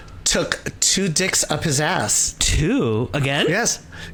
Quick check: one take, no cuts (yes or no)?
yes